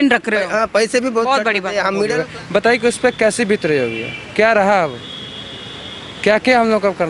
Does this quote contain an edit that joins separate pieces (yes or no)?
yes